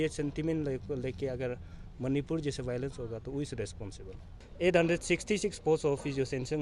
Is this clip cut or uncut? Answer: cut